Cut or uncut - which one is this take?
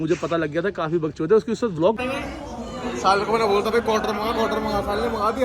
cut